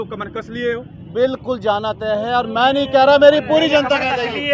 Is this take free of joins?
yes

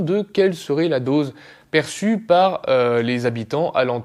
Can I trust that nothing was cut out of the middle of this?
yes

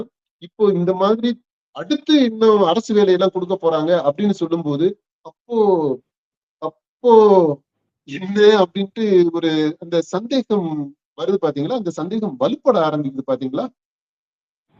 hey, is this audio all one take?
yes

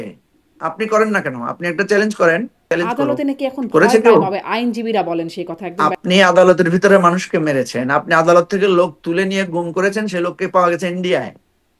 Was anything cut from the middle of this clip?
yes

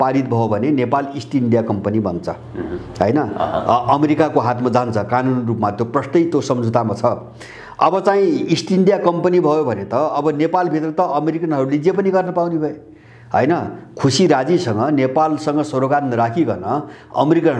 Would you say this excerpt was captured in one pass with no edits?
yes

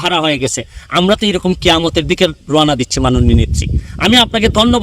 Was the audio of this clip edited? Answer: no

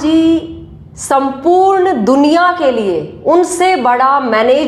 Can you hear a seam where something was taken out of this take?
no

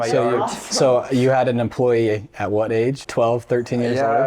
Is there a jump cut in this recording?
yes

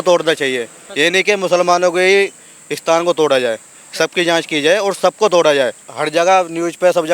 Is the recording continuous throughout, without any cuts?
no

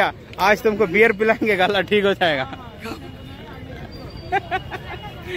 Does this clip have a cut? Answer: no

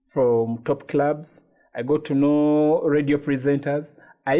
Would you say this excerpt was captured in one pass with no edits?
yes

